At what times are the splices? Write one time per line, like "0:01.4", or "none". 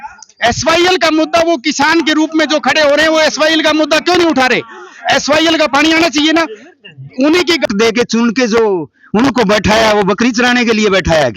0:07.7